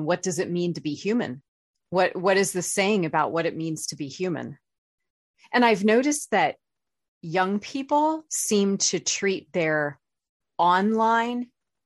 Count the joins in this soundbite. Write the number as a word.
one